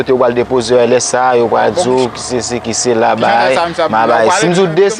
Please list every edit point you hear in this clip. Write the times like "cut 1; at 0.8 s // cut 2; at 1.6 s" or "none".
cut 1; at 2.2 s